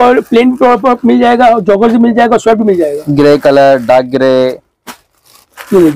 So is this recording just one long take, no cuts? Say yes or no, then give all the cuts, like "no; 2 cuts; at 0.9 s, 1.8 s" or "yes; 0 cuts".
yes; 0 cuts